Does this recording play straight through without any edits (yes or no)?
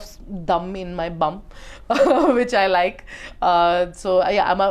yes